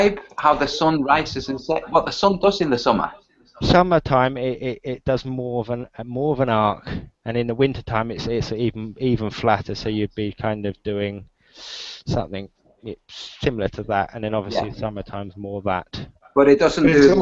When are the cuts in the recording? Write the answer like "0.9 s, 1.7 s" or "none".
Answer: none

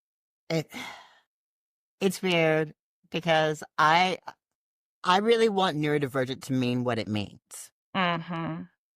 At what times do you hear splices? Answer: none

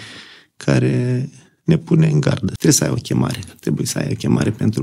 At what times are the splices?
2.6 s

